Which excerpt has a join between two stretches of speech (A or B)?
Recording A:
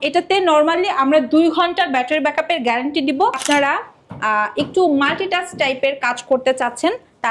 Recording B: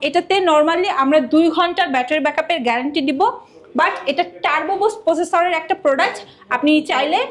A